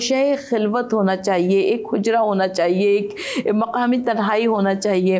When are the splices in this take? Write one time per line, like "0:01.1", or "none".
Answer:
none